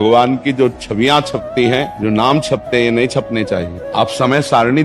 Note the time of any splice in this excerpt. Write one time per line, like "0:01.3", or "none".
0:01.9
0:03.8